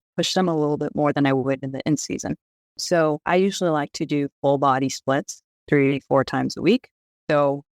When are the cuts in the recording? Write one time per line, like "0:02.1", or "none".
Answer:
0:02.9